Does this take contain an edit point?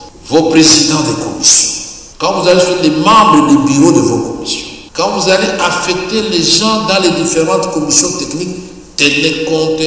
no; 0 cuts

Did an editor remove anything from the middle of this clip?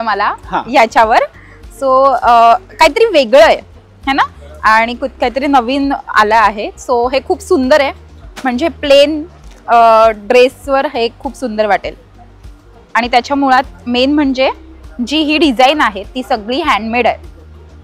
no; 0 cuts

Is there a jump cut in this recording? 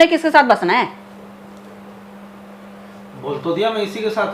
no; 0 cuts

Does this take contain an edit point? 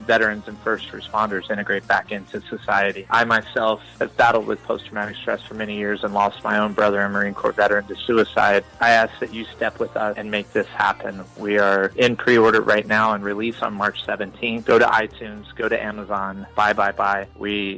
no; 0 cuts

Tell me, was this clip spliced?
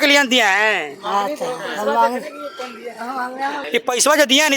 yes; 1 cut; at 3.6 s

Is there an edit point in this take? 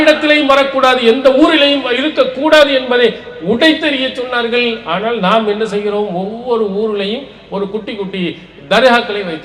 no; 0 cuts

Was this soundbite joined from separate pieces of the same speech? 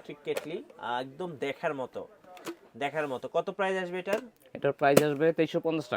no; 0 cuts

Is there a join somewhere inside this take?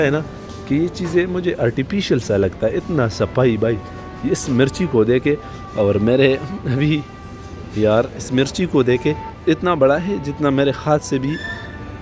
yes; 1 cut; at 9.3 s

